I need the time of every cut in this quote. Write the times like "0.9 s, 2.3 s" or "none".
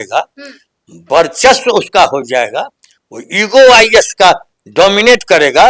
none

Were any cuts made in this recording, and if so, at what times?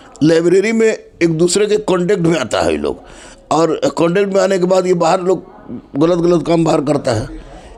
none

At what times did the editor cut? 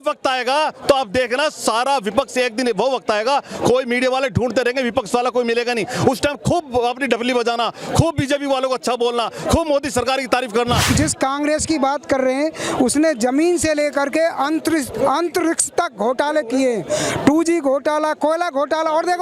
none

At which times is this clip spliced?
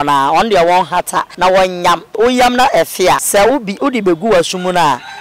1.3 s, 2.1 s, 3.2 s

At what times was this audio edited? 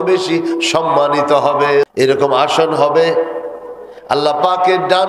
1.9 s

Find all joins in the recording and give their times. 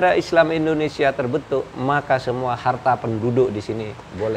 none

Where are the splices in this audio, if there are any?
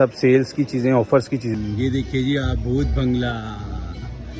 1.5 s

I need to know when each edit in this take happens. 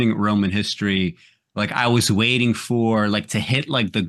none

